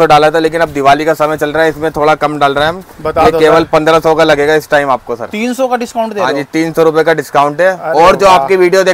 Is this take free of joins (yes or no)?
yes